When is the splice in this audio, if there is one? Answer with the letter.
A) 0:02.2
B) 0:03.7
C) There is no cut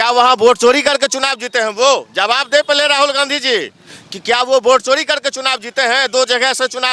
C